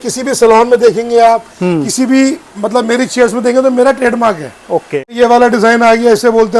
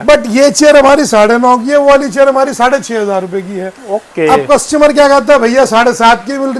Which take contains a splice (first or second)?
first